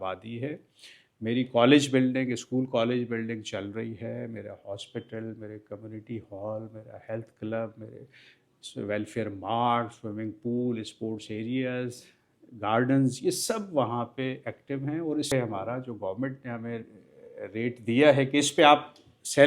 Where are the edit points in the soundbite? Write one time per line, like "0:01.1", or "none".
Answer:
0:15.3